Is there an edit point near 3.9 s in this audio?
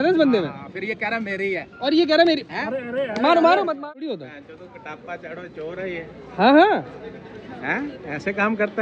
yes; 1 cut; at 3.9 s

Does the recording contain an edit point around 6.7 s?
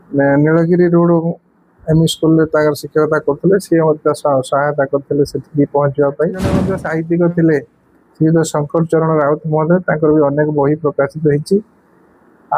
yes; 1 cut; at 6.7 s

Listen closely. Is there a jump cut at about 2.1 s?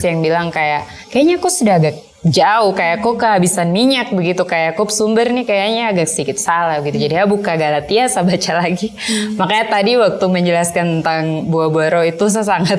yes; 1 cut; at 2.1 s

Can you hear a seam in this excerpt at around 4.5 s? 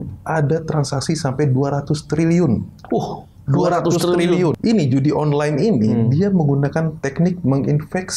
yes; 1 cut; at 4.5 s

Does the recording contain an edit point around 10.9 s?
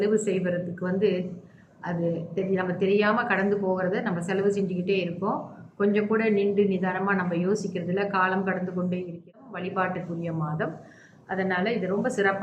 no; 1 cut; at 9.3 s

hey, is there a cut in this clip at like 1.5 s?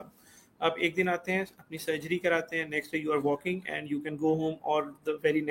no; 0 cuts

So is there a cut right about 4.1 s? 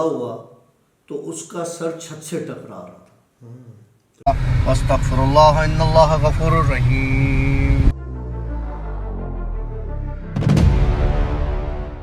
yes; 1 cut; at 4.1 s

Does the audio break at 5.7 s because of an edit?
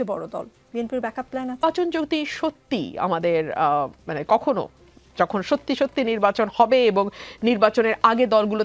no; 1 cut; at 1.6 s

